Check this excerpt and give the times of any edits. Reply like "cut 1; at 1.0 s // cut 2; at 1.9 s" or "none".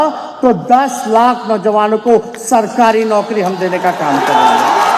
none